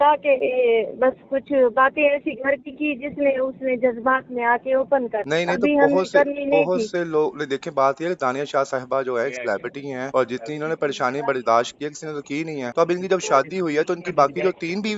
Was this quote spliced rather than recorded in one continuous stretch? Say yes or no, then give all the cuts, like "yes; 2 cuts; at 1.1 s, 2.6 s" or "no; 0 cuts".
no; 0 cuts